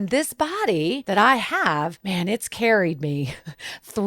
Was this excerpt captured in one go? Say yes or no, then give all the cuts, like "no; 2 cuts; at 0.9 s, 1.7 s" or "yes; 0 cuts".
no; 2 cuts; at 1.0 s, 2.0 s